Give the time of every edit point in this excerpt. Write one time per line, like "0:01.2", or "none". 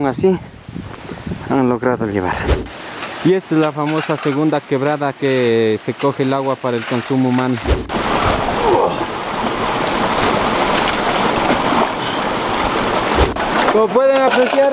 0:02.8
0:07.6
0:13.4